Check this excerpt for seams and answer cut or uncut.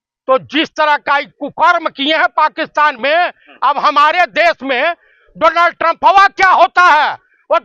uncut